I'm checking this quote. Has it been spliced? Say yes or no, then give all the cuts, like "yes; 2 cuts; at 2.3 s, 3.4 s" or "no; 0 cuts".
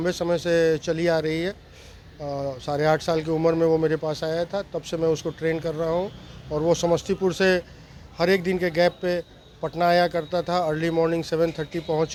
no; 0 cuts